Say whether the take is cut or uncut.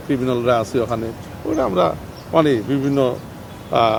uncut